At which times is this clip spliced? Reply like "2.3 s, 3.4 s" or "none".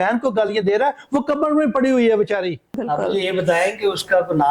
2.7 s

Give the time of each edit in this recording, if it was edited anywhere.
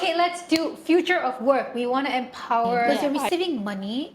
2.9 s

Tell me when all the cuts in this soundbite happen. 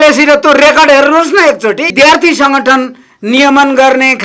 1.9 s

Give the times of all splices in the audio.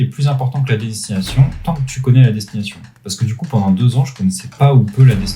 4.5 s

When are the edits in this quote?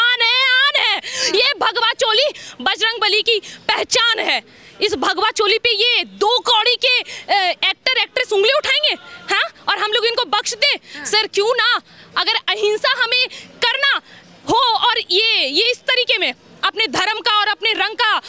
none

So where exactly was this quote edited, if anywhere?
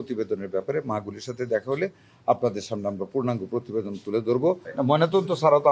4.7 s

